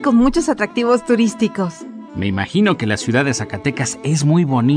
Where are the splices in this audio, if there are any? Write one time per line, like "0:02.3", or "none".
0:02.0